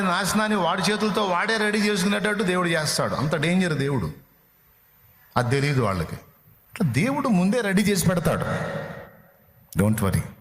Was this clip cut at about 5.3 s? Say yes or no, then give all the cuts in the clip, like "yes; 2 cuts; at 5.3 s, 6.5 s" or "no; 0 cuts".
no; 1 cut; at 6.8 s